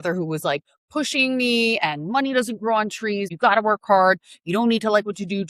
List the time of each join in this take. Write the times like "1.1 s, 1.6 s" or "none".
3.3 s